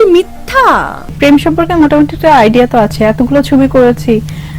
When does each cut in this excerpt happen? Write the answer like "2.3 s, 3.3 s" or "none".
1.2 s

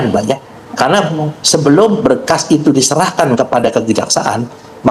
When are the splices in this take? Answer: none

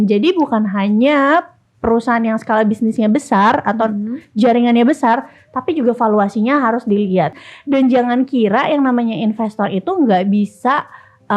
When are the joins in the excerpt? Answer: 7.3 s

